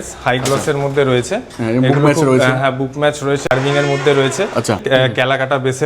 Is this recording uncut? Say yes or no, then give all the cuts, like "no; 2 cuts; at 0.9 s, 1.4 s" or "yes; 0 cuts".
no; 2 cuts; at 3.5 s, 4.8 s